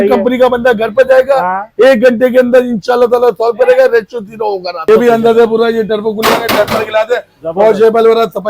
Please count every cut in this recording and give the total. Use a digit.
1